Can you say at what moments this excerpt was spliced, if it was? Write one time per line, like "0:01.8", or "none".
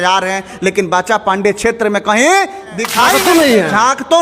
0:03.1